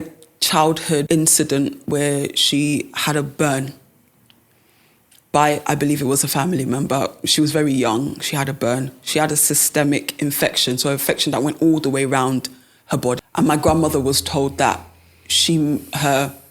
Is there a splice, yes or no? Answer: yes